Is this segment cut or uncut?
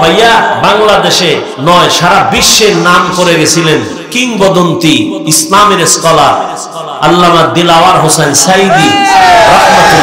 cut